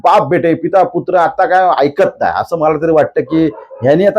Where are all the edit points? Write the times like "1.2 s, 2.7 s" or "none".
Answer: 2.7 s